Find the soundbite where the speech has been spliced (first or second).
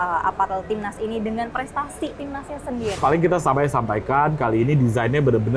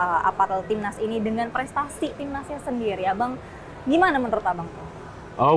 first